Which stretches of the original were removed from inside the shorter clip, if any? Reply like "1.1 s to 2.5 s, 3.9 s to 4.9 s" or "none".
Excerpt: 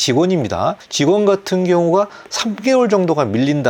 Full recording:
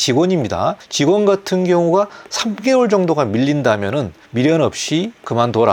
none